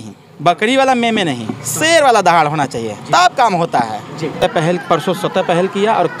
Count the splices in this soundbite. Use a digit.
1